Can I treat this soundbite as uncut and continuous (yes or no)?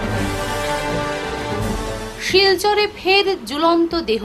yes